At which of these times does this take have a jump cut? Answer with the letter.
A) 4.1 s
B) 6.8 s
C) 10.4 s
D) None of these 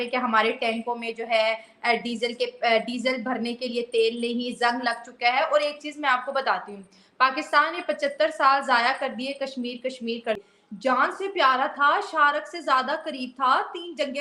C